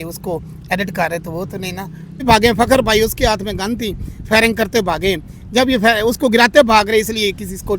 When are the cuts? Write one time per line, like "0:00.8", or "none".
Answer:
0:02.2